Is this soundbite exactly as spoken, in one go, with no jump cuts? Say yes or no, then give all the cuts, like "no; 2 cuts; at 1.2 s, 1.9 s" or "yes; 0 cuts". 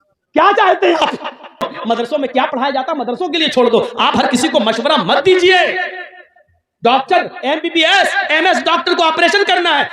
no; 1 cut; at 1.7 s